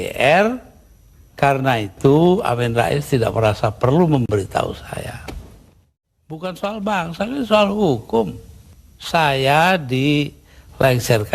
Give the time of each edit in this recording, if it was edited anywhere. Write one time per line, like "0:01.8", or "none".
0:05.9

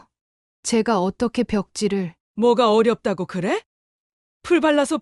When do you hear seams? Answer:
0:02.2

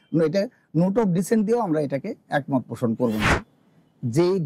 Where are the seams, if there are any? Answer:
0:03.3

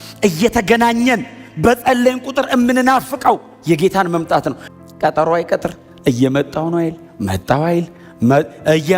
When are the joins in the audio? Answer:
0:04.6

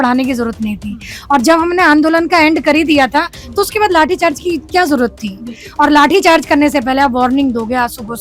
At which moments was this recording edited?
none

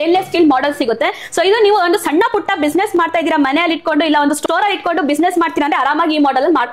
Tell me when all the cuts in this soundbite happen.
none

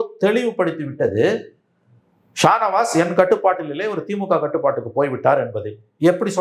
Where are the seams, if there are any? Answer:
none

